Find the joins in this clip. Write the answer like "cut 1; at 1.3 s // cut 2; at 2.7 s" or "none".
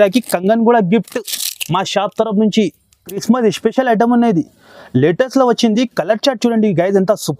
cut 1; at 3.1 s

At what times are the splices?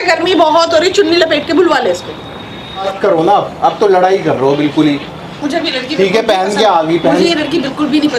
cut 1; at 2.9 s

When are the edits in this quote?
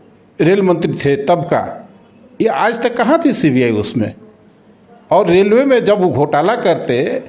none

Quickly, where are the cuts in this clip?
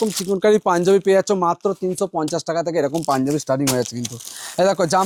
none

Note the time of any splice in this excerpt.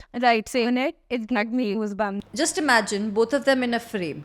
cut 1; at 2.2 s

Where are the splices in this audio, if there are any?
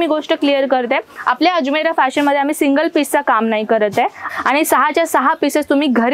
cut 1; at 4.2 s

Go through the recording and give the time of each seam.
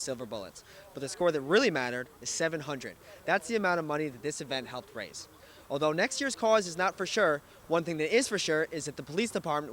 none

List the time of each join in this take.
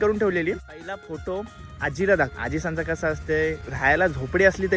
cut 1; at 1.0 s // cut 2; at 2.4 s // cut 3; at 3.7 s

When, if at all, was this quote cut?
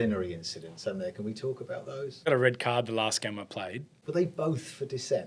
cut 1; at 2.3 s // cut 2; at 3.9 s

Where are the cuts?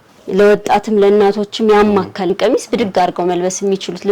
cut 1; at 2.3 s

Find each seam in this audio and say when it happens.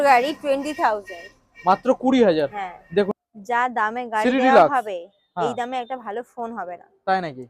cut 1; at 3.1 s

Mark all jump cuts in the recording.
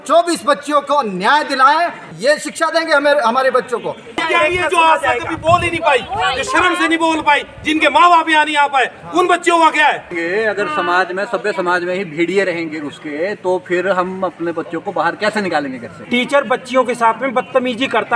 cut 1; at 2.1 s // cut 2; at 4.2 s // cut 3; at 10.1 s // cut 4; at 16.1 s

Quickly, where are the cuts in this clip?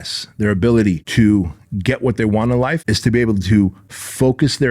cut 1; at 1.0 s // cut 2; at 2.9 s

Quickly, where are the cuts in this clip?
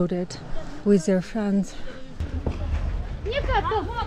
cut 1; at 2.3 s

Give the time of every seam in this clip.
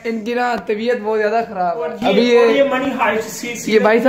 cut 1; at 1.9 s

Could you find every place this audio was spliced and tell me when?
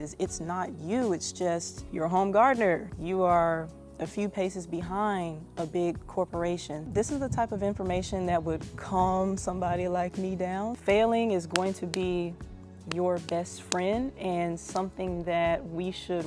cut 1; at 1.8 s // cut 2; at 2.9 s // cut 3; at 6.9 s // cut 4; at 10.8 s

